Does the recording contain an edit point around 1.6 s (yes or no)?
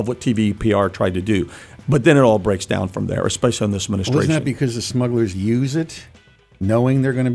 no